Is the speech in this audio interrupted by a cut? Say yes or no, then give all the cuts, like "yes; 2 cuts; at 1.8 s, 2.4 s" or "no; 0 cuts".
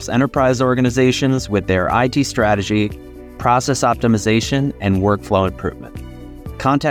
no; 0 cuts